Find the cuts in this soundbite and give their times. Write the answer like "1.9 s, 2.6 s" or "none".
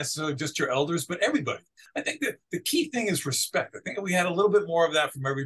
1.8 s

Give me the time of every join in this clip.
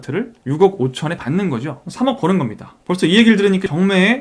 2.7 s

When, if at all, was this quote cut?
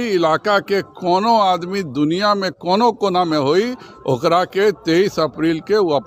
none

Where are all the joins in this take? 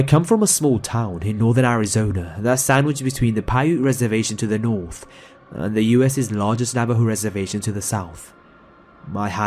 6.3 s

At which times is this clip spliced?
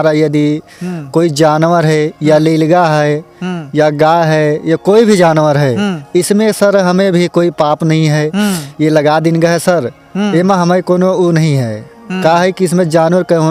none

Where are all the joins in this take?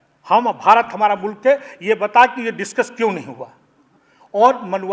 none

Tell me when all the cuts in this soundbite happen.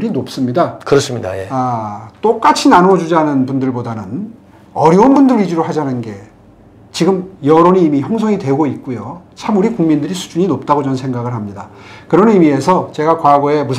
none

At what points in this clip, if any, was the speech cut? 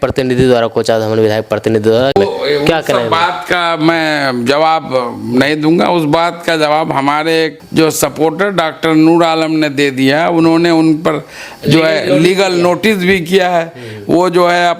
7.6 s

